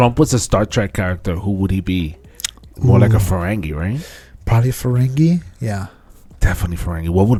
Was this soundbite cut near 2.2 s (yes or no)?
no